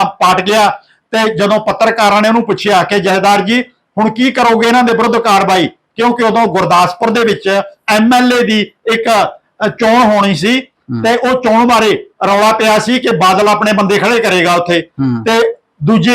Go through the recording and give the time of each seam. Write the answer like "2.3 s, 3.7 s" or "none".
none